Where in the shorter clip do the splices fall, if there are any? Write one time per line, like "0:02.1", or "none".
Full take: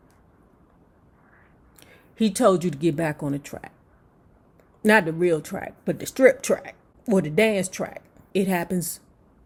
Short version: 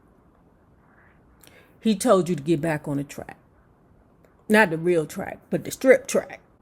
none

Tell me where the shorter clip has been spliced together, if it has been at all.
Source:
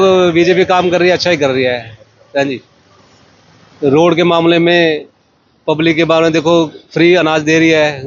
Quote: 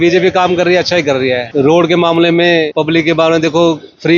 0:01.4
0:02.7

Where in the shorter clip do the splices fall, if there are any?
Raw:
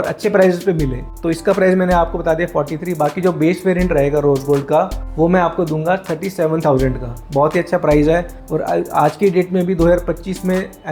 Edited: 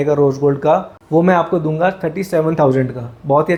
none

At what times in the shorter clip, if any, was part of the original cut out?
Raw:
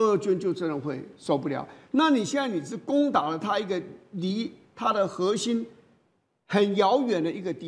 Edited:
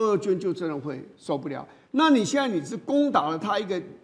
none

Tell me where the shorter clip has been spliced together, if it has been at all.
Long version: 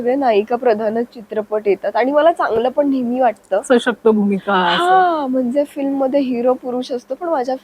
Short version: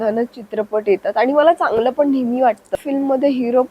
0:02.8

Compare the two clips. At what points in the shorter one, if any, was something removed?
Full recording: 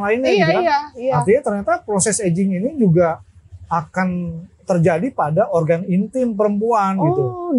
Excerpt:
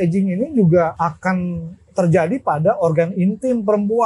0:00.9

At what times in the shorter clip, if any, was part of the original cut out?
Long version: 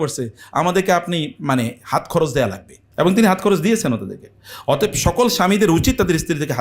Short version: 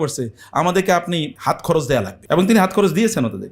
0:01.3
0:02.2

